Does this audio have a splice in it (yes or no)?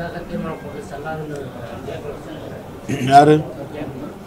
no